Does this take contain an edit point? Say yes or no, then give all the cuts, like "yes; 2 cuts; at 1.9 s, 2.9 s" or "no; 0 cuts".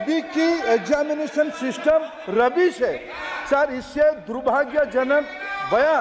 no; 0 cuts